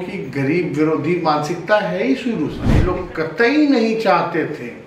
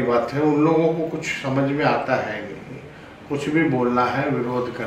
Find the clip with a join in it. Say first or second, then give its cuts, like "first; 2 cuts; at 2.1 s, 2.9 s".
first; 1 cut; at 2.8 s